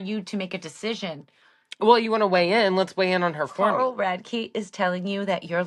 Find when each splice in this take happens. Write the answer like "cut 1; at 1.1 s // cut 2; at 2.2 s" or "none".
cut 1; at 3.6 s